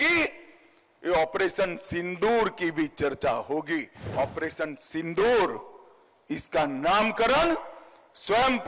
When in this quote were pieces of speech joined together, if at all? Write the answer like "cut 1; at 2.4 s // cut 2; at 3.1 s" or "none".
cut 1; at 4.1 s